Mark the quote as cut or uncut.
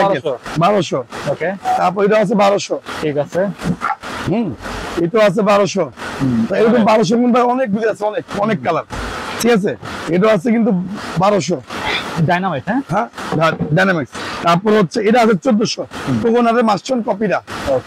uncut